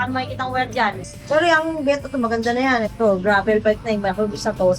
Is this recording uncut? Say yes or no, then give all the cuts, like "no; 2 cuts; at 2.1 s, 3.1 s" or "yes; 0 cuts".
no; 2 cuts; at 1.1 s, 2.9 s